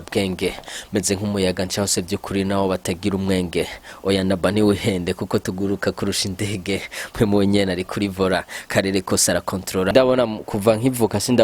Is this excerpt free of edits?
no; 1 cut; at 9.9 s

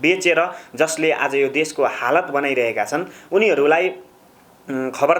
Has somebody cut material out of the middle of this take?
no; 0 cuts

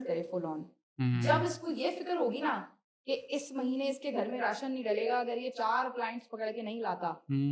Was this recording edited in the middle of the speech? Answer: no; 0 cuts

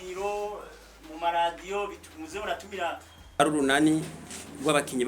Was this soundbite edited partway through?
yes; 1 cut; at 3.4 s

